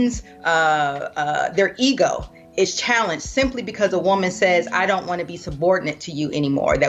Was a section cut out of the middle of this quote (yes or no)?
no